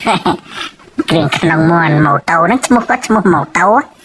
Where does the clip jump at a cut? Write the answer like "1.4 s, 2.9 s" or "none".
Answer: none